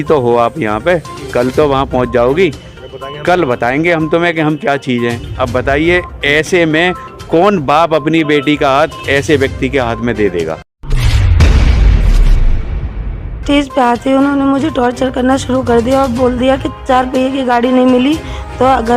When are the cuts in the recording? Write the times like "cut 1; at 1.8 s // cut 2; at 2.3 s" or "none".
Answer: cut 1; at 10.7 s

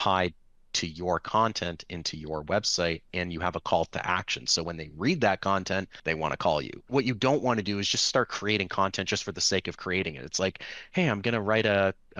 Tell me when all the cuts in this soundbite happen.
cut 1; at 5.9 s // cut 2; at 6.9 s

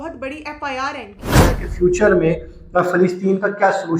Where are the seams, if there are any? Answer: cut 1; at 1.3 s

